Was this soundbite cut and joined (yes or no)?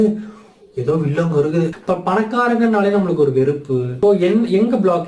yes